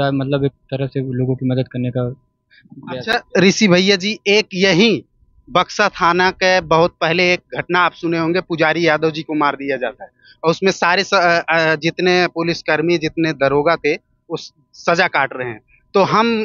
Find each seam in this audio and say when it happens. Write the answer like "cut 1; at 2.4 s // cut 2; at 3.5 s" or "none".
none